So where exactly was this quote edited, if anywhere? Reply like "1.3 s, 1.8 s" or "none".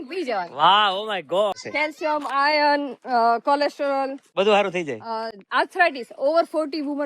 1.6 s

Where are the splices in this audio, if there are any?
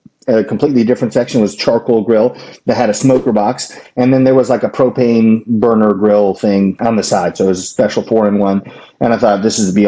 none

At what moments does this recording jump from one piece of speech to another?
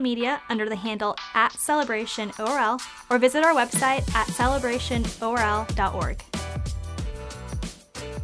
6.2 s

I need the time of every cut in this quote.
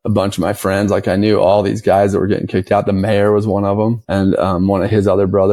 none

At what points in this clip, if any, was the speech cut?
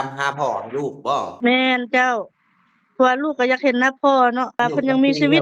1.5 s, 4.6 s

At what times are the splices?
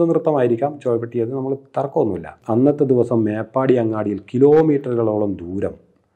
2.3 s

